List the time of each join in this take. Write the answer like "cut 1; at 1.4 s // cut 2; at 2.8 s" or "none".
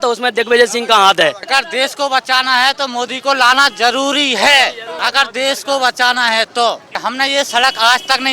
cut 1; at 1.4 s // cut 2; at 4.9 s // cut 3; at 6.9 s